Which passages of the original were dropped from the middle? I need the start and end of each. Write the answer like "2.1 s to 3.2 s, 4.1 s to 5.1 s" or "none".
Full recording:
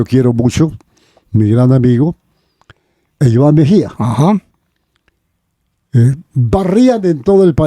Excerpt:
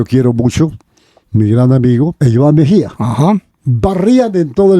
2.2 s to 3.1 s, 4.6 s to 6.3 s